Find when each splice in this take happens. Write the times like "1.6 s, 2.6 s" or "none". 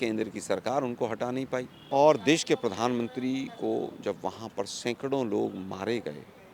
1.8 s